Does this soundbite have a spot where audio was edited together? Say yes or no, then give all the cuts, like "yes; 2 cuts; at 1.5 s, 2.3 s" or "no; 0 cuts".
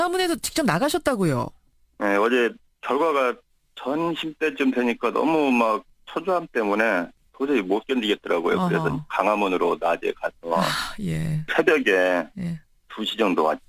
yes; 1 cut; at 2.6 s